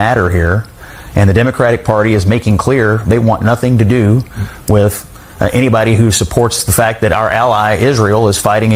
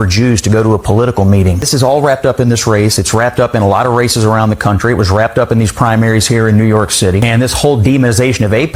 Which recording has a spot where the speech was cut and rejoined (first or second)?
second